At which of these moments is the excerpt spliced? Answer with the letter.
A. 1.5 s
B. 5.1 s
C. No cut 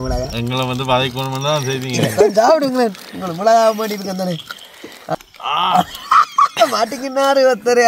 B